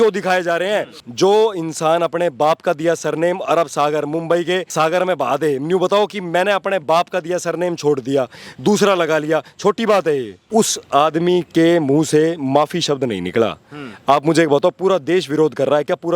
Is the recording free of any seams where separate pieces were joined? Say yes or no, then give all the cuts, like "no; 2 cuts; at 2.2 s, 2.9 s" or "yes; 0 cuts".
no; 3 cuts; at 1.0 s, 4.7 s, 10.4 s